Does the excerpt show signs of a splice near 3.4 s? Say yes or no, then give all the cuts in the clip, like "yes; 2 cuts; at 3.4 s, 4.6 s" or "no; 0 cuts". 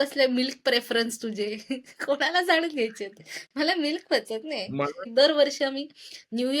no; 1 cut; at 5.0 s